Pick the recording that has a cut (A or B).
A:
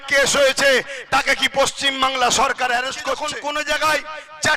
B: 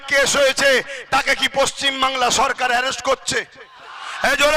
A